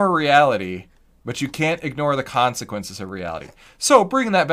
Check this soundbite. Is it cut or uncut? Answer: uncut